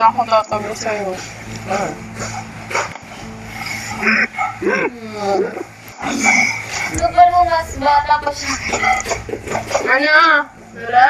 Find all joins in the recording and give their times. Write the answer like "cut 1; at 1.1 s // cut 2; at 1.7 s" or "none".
none

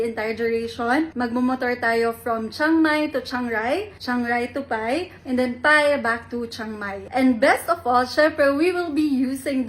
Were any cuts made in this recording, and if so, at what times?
cut 1; at 7.0 s

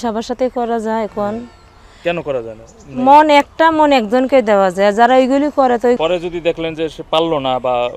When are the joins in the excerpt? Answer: cut 1; at 6.0 s

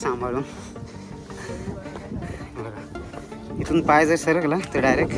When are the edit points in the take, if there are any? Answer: none

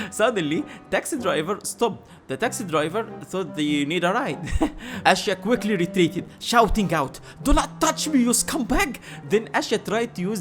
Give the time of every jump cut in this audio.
cut 1; at 4.9 s

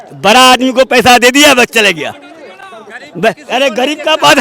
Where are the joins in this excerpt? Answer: none

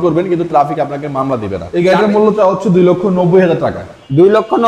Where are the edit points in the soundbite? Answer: cut 1; at 1.7 s

